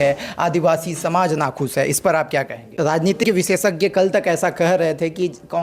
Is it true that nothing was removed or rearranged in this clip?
no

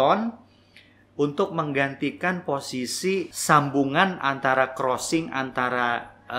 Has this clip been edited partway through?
yes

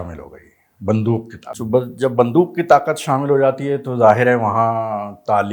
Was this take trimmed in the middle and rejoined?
yes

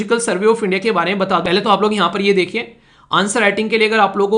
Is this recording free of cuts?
no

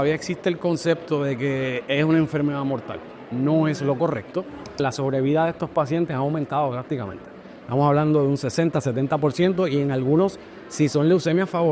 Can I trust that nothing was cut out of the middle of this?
no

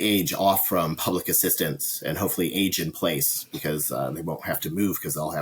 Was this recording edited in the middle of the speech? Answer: no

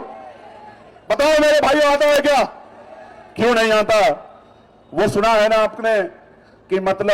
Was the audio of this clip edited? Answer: no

